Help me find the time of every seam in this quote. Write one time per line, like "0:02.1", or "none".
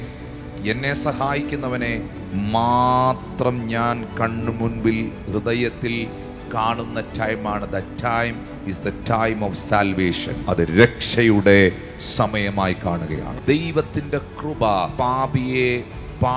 0:02.2
0:10.3
0:13.3
0:14.9